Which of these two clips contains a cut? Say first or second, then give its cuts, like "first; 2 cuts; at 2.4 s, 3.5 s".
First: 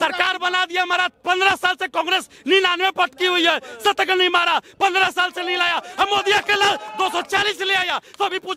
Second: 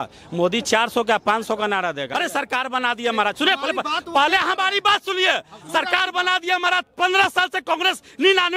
second; 1 cut; at 2.1 s